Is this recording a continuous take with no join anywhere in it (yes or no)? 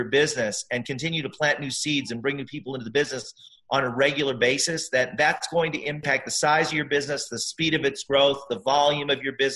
no